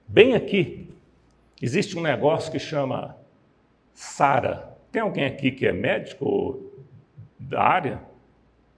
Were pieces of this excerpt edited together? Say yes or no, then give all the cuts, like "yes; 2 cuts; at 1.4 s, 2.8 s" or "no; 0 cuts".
no; 0 cuts